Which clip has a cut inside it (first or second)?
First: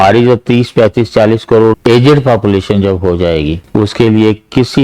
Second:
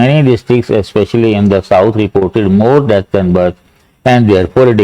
first